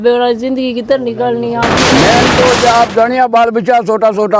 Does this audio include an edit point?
yes; 1 cut; at 1.8 s

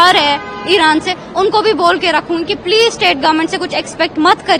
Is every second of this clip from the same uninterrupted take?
yes; 0 cuts

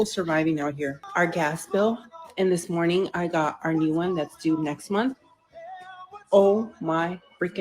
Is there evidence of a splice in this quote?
yes; 1 cut; at 1.0 s

